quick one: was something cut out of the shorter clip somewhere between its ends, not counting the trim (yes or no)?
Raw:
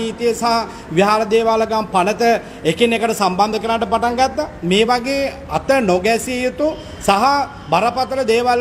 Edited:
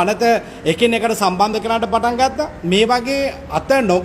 no